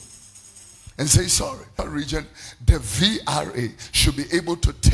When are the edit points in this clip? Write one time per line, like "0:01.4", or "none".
0:01.8